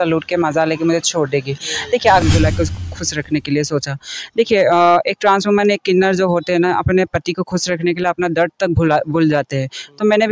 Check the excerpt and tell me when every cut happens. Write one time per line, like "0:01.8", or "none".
0:02.2